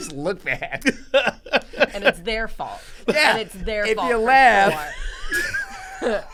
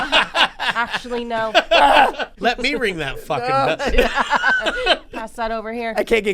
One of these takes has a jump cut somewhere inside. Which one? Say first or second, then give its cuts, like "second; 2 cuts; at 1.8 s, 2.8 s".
second; 1 cut; at 2.3 s